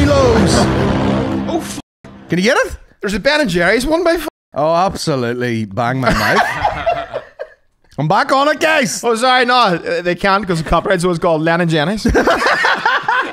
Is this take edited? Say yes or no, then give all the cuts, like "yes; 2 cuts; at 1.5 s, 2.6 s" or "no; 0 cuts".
no; 0 cuts